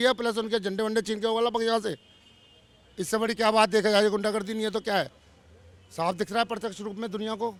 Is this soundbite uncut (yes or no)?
yes